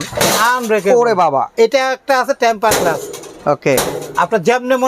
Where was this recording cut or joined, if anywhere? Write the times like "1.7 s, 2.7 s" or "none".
1.5 s

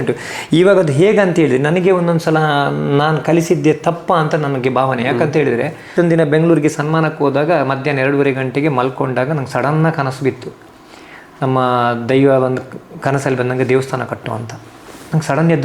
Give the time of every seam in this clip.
5.9 s

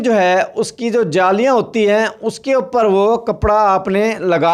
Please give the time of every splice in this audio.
none

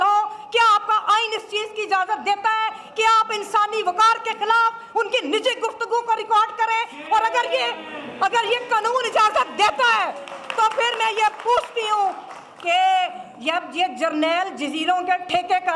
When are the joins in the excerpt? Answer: none

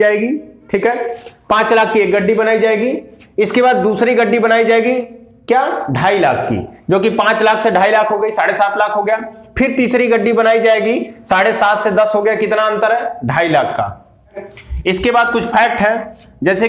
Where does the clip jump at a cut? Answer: 14.4 s

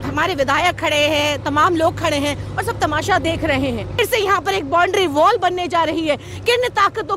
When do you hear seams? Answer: 4.0 s

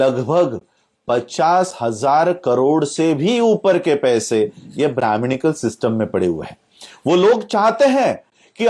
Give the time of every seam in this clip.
none

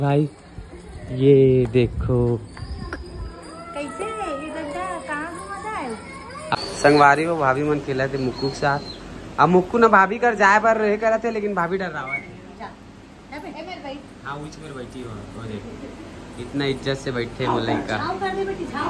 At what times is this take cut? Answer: 6.6 s

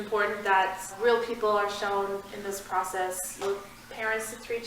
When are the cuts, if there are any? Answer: 1.0 s, 3.4 s

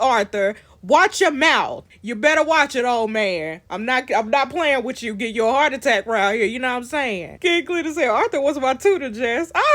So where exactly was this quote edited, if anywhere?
1.8 s, 7.3 s

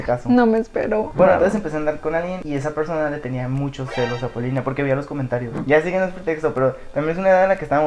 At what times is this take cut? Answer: none

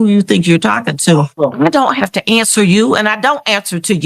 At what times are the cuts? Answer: 1.3 s

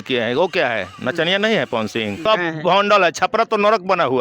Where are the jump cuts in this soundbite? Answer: 2.3 s

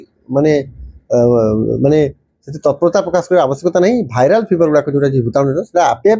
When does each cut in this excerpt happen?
none

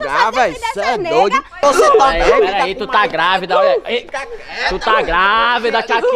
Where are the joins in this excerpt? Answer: 1.5 s

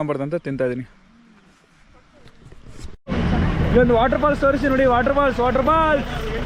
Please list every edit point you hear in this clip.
3.0 s

